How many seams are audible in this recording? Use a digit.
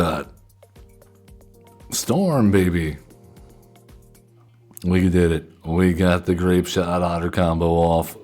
1